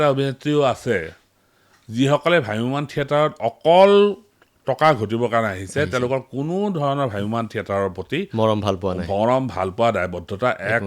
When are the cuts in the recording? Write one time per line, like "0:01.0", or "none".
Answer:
none